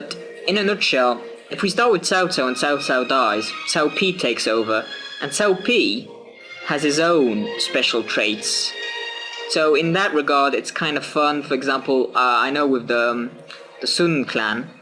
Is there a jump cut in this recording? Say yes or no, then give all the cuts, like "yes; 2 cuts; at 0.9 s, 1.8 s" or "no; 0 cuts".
yes; 1 cut; at 3.3 s